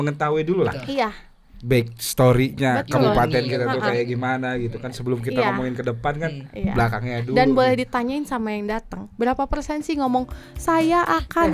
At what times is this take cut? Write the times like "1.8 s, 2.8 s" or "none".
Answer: none